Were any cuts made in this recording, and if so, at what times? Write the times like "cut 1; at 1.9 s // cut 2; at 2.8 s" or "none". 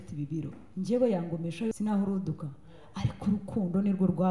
cut 1; at 1.7 s